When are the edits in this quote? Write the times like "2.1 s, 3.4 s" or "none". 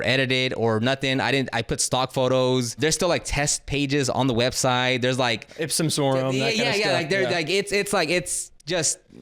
2.7 s